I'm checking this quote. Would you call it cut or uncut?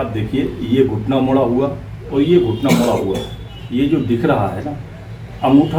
uncut